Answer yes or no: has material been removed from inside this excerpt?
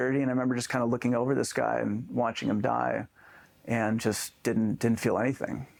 no